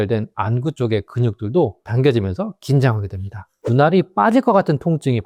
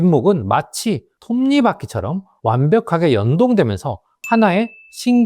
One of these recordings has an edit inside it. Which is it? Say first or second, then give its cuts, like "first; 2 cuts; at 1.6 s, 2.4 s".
second; 2 cuts; at 1.1 s, 2.3 s